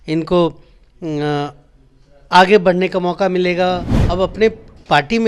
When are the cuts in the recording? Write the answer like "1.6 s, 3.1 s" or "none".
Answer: 3.9 s